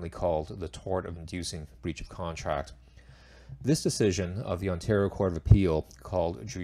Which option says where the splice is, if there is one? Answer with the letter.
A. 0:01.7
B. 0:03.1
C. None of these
A